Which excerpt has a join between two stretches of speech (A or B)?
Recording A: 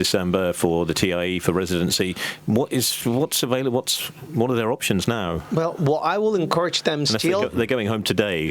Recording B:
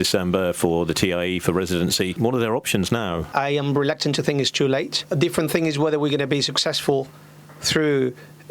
B